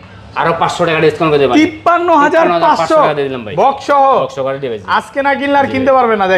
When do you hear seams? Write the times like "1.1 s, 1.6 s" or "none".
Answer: none